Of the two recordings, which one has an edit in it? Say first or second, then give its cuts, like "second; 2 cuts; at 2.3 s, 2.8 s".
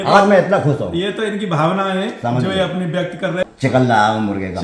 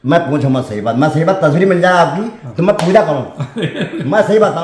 first; 1 cut; at 3.5 s